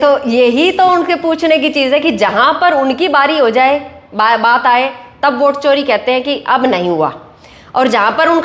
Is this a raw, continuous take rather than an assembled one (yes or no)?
yes